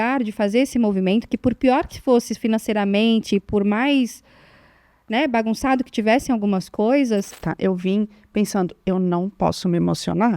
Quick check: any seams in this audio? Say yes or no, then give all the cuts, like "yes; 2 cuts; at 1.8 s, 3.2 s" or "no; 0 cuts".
yes; 1 cut; at 7.4 s